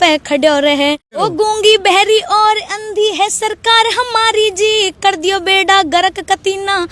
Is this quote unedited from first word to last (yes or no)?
no